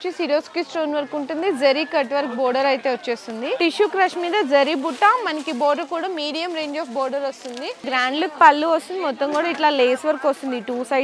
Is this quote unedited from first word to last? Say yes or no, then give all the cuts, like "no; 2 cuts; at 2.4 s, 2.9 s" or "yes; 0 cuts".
no; 2 cuts; at 3.6 s, 7.8 s